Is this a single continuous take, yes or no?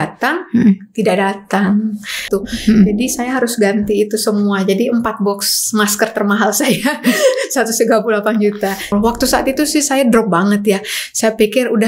no